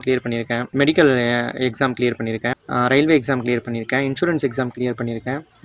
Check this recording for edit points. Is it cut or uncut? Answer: uncut